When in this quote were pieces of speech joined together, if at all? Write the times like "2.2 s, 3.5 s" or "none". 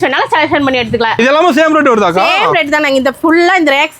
1.2 s